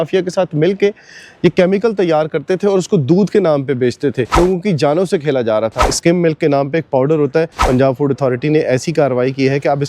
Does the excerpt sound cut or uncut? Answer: cut